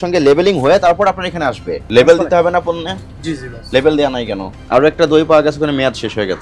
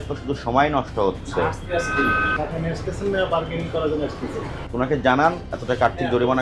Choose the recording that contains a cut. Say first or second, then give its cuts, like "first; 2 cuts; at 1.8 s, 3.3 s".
first; 2 cuts; at 1.8 s, 4.5 s